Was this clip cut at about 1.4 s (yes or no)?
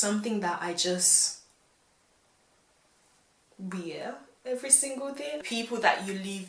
no